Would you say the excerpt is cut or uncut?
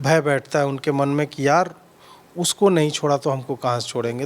uncut